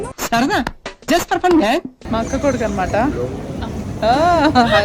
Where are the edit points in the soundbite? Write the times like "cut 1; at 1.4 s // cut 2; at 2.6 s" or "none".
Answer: cut 1; at 2.0 s